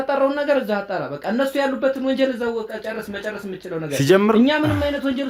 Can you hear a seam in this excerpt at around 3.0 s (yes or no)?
no